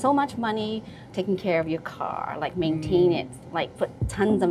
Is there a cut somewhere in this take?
yes; 1 cut; at 1.0 s

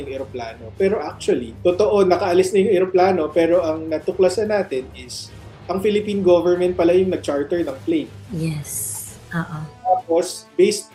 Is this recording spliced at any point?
no; 0 cuts

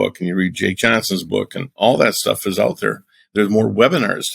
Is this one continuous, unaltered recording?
no; 1 cut; at 1.8 s

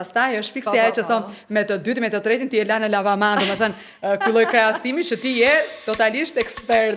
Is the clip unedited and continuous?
yes; 0 cuts

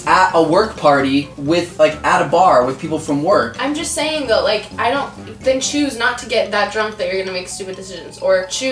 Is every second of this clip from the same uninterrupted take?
yes; 0 cuts

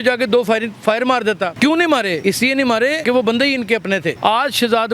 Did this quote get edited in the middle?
yes; 3 cuts; at 1.5 s, 2.5 s, 4.2 s

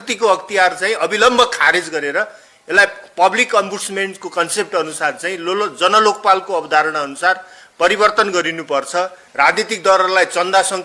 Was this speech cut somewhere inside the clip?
yes; 1 cut; at 9.2 s

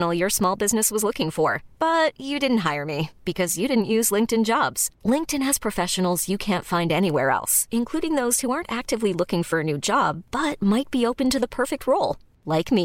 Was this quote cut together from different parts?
no; 0 cuts

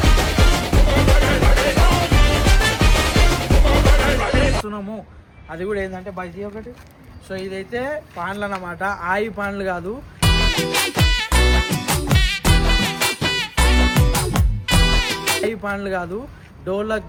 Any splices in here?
no; 0 cuts

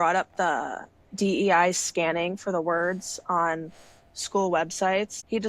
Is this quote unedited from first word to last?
yes; 0 cuts

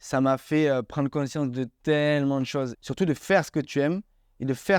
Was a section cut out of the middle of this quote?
yes; 1 cut; at 2.8 s

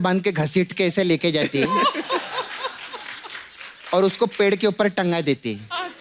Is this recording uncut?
yes; 0 cuts

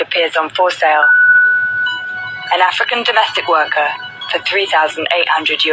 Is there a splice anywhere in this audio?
no; 0 cuts

